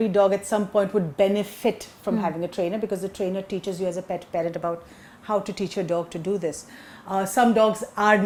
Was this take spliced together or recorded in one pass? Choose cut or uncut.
uncut